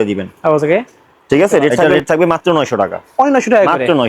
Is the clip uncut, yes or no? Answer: no